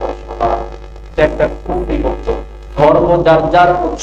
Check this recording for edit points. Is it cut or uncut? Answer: cut